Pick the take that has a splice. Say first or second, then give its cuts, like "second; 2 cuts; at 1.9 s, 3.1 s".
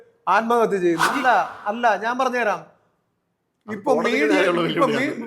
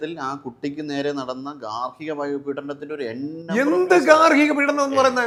first; 1 cut; at 1.1 s